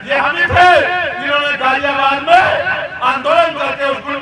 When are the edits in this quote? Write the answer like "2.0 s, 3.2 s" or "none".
none

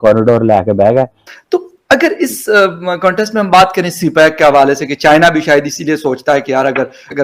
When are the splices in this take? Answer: none

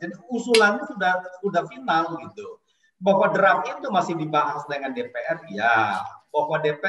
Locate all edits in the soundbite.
none

